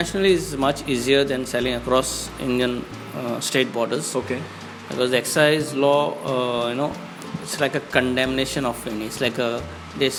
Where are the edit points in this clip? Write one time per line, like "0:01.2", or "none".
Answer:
none